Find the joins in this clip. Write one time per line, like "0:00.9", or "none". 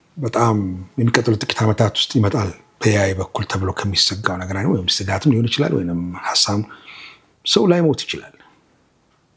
none